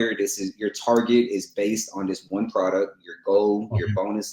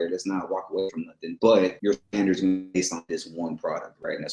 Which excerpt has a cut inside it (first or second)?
second